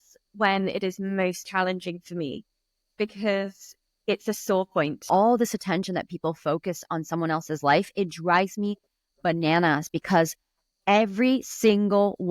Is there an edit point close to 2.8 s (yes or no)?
no